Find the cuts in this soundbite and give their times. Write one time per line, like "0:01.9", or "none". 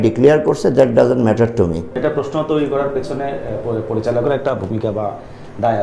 none